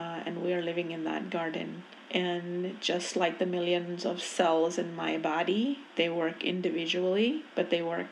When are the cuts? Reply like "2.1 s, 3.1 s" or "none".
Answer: none